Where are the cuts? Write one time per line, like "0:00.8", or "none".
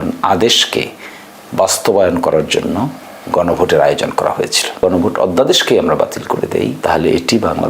0:04.8
0:06.8

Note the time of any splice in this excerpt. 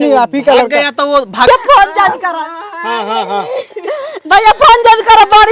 0:01.5

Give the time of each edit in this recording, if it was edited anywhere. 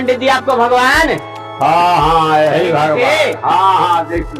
none

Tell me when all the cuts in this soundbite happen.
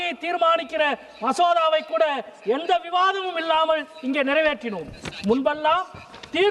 none

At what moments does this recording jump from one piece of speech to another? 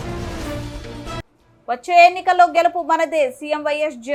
none

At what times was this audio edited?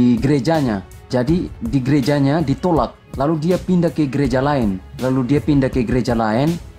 0:01.1
0:03.0
0:04.9

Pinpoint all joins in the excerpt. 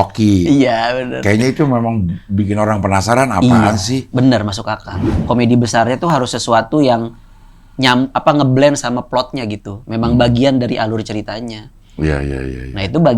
0:05.1

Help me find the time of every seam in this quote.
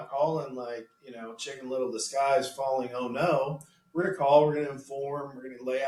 none

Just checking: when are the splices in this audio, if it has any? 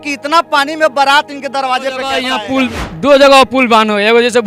0:02.4

